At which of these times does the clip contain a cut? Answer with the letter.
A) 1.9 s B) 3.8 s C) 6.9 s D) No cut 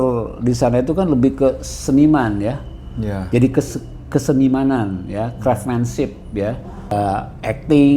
C